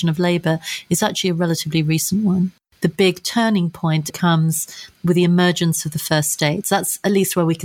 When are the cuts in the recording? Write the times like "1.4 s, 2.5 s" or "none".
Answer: 2.6 s, 4.1 s